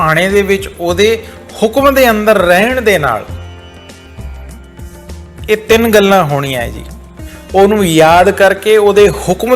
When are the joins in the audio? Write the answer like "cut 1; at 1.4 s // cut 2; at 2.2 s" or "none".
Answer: cut 1; at 3.3 s // cut 2; at 5.0 s

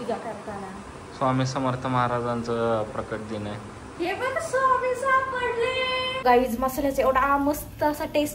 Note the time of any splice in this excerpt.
cut 1; at 6.2 s

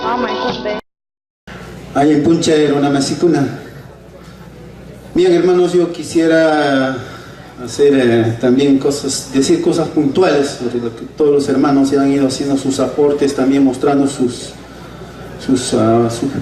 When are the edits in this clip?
none

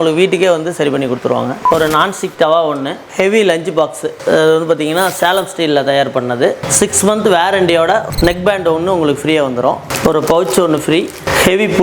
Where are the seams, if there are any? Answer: cut 1; at 1.6 s // cut 2; at 3.1 s

